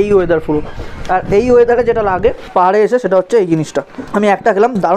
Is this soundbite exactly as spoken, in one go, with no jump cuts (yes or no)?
no